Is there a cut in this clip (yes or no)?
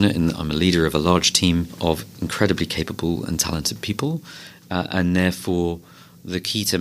yes